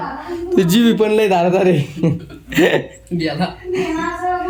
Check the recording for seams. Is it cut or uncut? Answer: uncut